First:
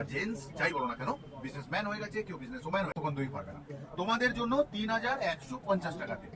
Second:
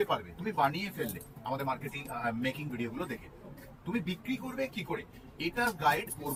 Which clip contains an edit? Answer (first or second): first